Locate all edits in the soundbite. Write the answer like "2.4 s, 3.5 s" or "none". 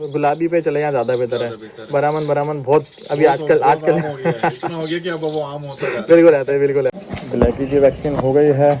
7.0 s